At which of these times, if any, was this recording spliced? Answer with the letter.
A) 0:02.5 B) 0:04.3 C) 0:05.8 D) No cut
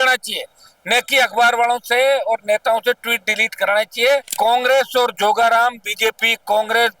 B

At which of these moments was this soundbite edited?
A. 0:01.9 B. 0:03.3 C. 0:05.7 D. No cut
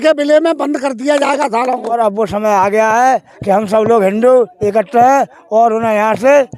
A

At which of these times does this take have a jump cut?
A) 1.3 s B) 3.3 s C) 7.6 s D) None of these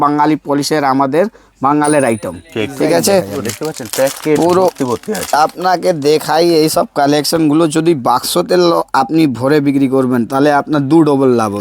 B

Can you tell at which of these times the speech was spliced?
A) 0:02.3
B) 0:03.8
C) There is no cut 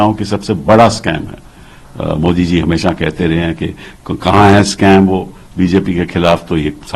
C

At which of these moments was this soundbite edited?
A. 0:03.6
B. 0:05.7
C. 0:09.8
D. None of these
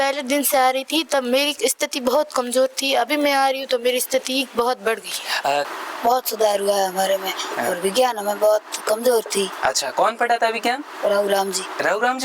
B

